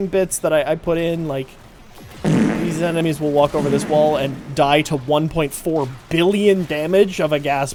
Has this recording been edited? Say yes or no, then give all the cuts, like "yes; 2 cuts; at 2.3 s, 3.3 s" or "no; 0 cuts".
no; 0 cuts